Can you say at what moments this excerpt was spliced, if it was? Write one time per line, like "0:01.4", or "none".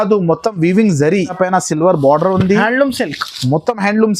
0:01.3